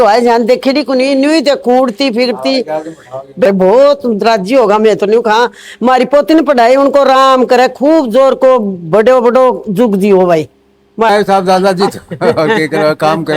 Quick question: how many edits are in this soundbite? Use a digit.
2